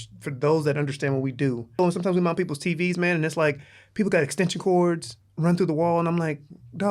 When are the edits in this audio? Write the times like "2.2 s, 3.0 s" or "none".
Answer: 1.8 s